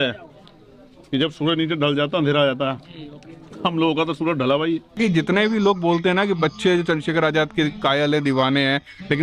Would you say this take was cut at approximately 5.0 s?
yes; 1 cut; at 5.0 s

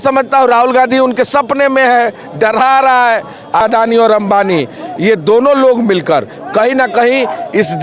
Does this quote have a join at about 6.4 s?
no; 1 cut; at 3.6 s

